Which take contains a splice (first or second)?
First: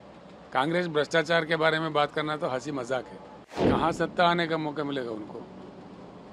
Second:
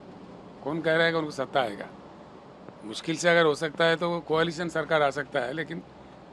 first